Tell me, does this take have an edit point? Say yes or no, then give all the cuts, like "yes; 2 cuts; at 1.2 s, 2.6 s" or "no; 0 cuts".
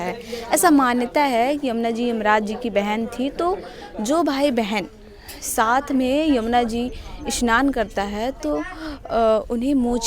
no; 0 cuts